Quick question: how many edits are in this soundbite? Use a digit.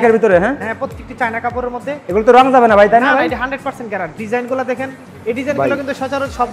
1